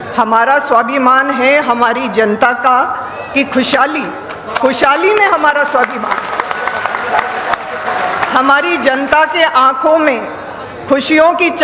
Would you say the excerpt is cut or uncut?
uncut